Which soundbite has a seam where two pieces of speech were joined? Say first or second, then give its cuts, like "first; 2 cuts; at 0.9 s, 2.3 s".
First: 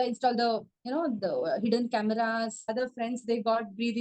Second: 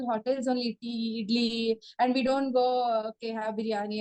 first; 1 cut; at 2.7 s